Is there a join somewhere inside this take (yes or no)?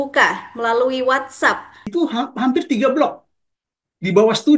yes